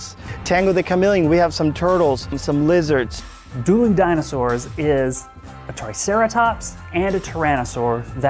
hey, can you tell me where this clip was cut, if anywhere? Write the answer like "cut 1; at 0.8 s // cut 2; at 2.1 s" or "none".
cut 1; at 2.4 s // cut 2; at 3.1 s